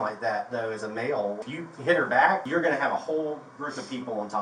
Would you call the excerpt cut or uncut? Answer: cut